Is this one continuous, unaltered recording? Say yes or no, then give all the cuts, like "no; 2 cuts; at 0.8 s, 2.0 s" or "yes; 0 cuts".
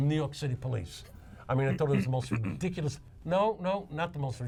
yes; 0 cuts